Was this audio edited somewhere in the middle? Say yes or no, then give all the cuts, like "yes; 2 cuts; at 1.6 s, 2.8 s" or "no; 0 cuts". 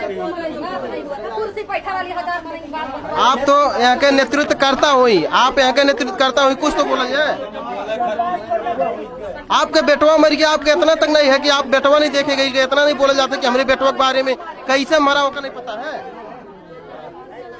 no; 0 cuts